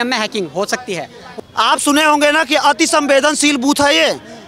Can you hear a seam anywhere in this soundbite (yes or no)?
yes